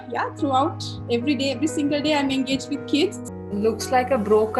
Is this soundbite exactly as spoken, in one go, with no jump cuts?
no; 1 cut; at 3.3 s

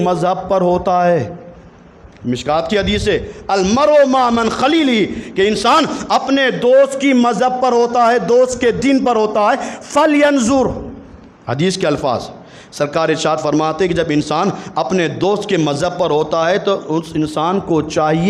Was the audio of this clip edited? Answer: no; 0 cuts

